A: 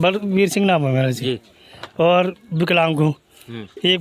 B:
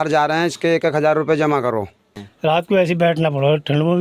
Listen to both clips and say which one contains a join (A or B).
B